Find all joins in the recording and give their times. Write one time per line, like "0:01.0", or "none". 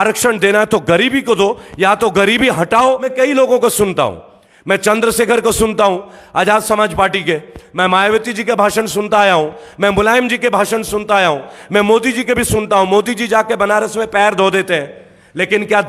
0:03.1